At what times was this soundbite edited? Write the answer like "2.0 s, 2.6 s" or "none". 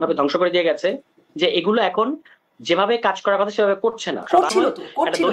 4.2 s